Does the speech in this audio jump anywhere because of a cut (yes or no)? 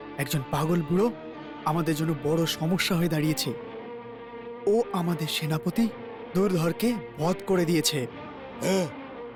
no